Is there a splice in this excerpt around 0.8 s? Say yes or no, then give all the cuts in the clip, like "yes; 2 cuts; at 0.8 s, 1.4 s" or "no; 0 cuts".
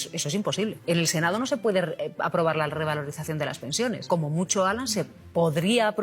yes; 2 cuts; at 0.8 s, 4.0 s